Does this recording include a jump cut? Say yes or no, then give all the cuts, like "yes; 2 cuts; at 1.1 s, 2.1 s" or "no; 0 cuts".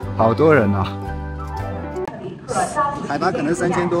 yes; 1 cut; at 2.1 s